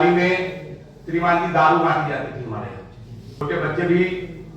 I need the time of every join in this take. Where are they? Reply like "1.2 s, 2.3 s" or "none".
3.4 s